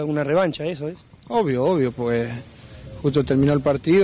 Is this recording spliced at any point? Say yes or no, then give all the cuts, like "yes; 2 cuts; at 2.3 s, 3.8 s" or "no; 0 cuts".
no; 0 cuts